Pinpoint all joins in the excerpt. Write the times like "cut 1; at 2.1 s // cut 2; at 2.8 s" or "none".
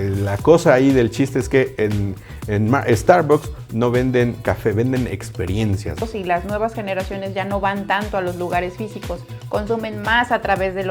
cut 1; at 6.0 s